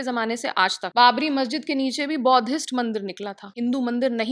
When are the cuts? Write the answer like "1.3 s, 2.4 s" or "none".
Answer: 0.9 s, 3.5 s